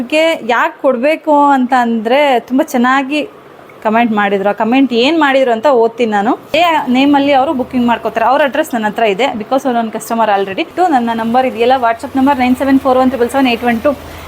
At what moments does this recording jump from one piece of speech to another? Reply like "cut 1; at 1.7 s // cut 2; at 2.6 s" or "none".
cut 1; at 6.5 s // cut 2; at 10.7 s